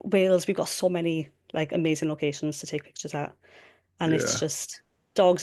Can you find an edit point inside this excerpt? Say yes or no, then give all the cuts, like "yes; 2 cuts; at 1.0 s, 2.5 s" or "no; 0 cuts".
no; 0 cuts